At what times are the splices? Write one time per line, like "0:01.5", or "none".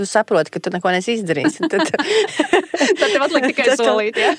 none